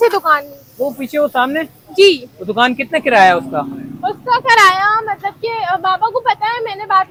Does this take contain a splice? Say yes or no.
no